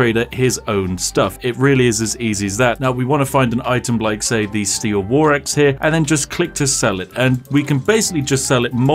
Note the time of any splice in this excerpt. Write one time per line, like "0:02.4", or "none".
none